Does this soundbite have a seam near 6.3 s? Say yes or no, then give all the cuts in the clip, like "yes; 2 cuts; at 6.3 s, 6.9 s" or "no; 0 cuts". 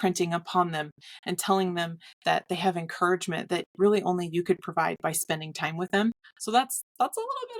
yes; 1 cut; at 6.3 s